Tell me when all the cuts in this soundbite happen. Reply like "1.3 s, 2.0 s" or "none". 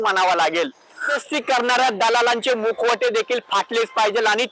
1.1 s